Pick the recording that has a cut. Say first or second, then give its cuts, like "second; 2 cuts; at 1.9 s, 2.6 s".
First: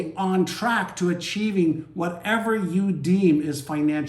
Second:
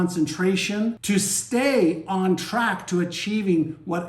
second; 1 cut; at 1.0 s